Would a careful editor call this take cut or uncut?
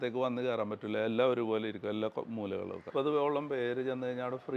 cut